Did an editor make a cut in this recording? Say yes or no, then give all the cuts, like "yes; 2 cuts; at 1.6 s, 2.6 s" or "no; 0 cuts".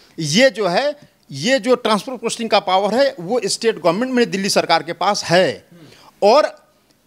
no; 0 cuts